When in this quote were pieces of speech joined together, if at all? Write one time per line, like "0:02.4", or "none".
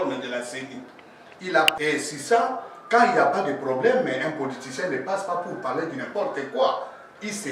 0:01.7